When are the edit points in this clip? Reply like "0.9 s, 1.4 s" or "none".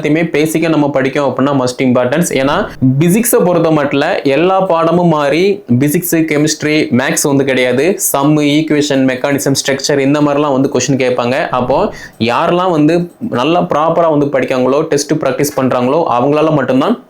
2.7 s